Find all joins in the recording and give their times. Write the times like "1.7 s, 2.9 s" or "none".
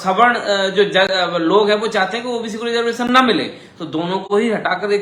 none